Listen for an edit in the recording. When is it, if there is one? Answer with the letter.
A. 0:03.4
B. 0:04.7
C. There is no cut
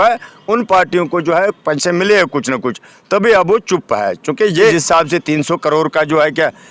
B